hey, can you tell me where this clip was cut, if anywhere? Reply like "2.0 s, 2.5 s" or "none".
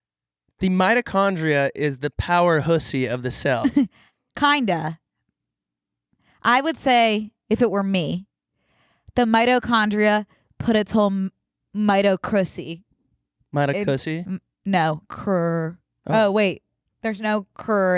none

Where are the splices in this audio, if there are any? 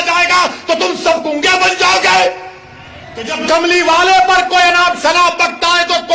3.3 s

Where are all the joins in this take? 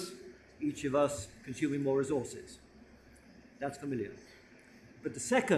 0.9 s

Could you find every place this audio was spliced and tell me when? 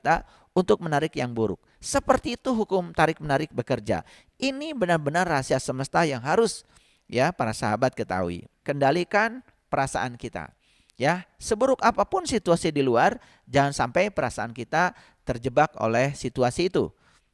8.5 s

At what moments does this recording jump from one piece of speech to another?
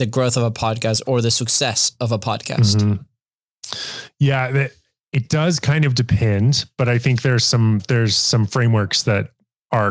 none

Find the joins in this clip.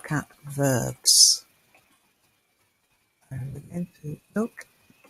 3.7 s

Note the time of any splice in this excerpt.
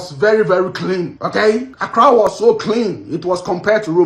1.7 s

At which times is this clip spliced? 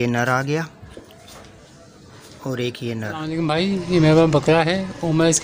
3.4 s

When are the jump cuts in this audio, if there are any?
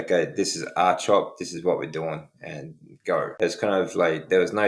3.3 s

